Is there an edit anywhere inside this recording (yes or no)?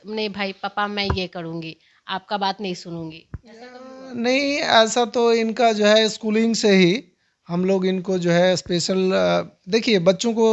no